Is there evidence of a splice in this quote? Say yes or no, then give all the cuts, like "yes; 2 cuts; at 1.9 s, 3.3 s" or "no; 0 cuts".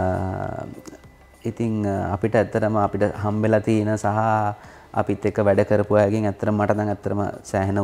no; 0 cuts